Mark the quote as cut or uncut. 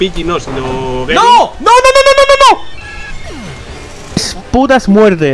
cut